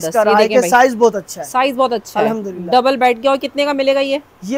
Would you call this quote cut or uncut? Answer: uncut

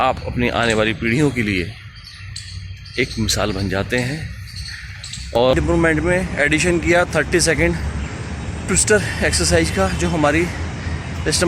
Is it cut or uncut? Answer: cut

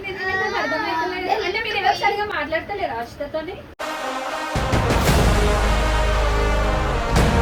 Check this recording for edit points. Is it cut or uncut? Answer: uncut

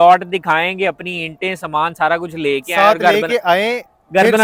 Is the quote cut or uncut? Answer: uncut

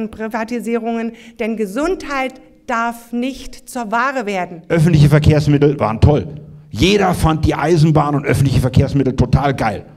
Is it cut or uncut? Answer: cut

